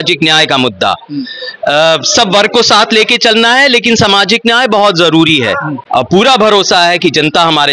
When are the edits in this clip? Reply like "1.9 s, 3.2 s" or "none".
5.8 s

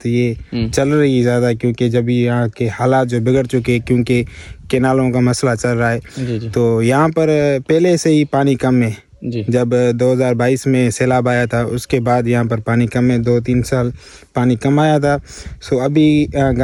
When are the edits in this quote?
none

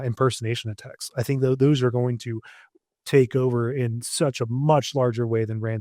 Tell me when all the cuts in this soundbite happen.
none

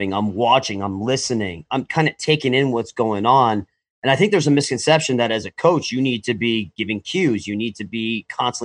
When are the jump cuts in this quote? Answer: none

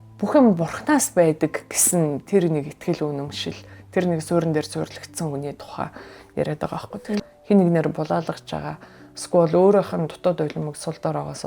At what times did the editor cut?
7.2 s

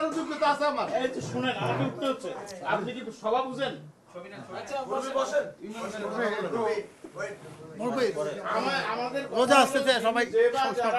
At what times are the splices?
none

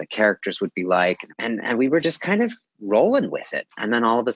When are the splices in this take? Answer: 1.3 s

